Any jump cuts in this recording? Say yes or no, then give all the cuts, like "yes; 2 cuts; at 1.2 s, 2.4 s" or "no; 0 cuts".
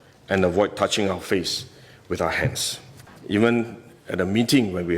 yes; 1 cut; at 3.1 s